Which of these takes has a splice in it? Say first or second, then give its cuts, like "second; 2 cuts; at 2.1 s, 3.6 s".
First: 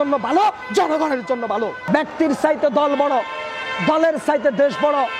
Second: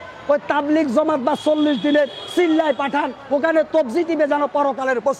first; 1 cut; at 1.8 s